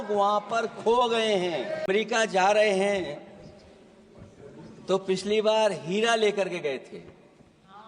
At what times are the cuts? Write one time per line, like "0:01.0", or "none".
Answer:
0:01.9